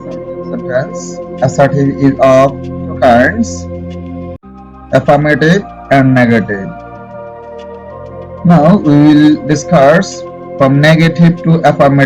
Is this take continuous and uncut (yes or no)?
no